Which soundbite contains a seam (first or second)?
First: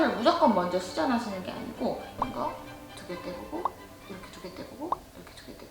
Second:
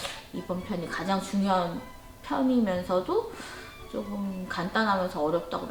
first